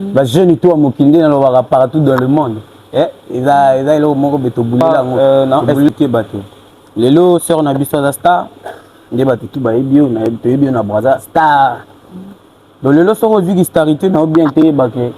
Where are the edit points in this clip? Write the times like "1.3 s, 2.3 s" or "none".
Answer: 4.8 s